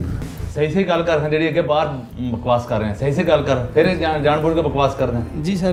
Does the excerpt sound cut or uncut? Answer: uncut